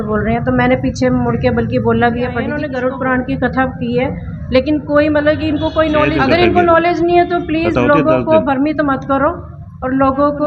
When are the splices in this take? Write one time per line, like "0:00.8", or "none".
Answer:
0:02.6
0:06.1